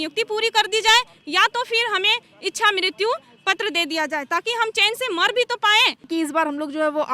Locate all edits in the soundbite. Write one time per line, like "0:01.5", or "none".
0:06.1